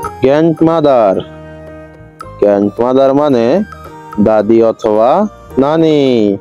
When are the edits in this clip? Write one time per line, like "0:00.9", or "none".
none